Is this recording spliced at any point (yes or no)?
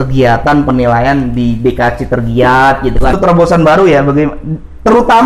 yes